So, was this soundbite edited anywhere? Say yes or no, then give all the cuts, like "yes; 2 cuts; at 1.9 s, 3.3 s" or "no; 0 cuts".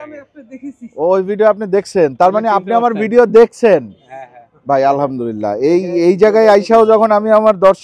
no; 0 cuts